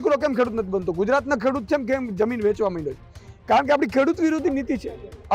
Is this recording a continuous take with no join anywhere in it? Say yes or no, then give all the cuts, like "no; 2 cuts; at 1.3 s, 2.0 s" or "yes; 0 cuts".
yes; 0 cuts